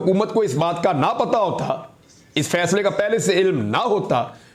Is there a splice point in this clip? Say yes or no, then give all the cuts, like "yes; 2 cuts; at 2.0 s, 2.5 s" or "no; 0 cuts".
no; 0 cuts